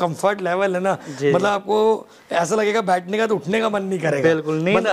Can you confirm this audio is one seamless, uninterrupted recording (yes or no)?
yes